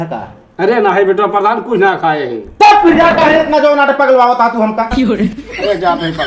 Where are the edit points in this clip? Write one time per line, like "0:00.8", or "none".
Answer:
none